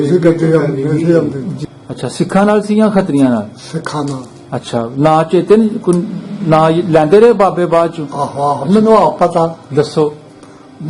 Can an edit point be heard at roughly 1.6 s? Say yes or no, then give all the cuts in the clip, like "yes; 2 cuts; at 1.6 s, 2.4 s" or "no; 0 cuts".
yes; 1 cut; at 1.6 s